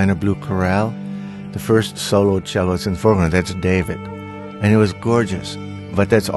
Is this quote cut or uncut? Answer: uncut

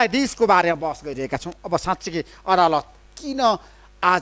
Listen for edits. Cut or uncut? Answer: uncut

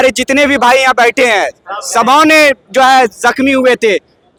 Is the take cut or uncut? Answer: uncut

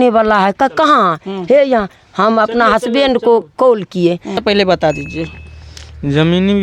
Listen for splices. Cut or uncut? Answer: cut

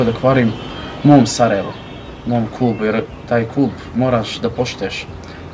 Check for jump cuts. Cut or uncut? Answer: uncut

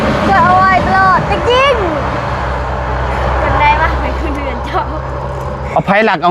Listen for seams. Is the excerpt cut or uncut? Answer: uncut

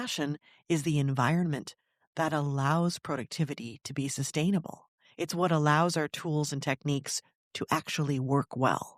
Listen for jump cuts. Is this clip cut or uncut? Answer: uncut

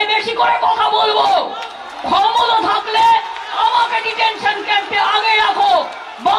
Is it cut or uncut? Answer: uncut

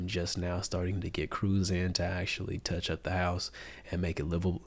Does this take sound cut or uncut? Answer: uncut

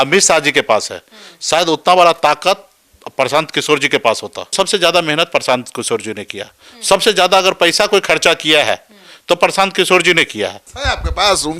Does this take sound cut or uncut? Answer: cut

